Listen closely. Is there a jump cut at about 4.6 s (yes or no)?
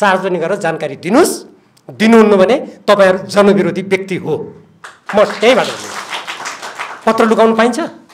no